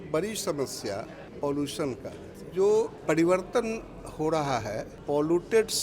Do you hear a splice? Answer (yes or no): yes